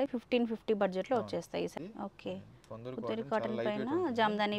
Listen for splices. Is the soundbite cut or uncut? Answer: cut